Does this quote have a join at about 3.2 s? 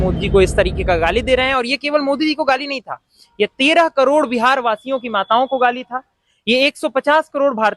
no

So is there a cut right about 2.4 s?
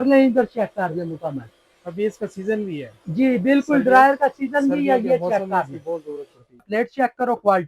no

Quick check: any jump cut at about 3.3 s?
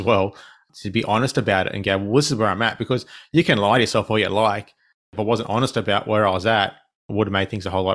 no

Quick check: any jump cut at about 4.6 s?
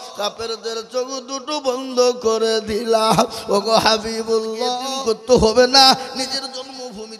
yes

